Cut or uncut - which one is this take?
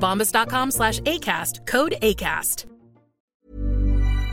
cut